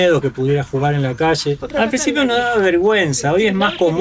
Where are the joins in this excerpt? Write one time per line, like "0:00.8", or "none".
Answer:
0:01.6